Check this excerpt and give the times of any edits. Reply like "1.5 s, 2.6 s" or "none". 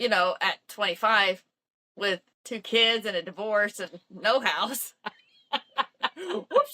2.3 s